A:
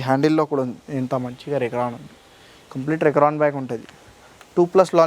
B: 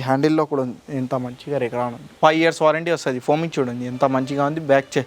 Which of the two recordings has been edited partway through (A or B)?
B